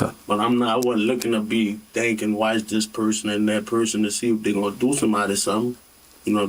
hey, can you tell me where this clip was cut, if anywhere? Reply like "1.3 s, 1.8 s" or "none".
none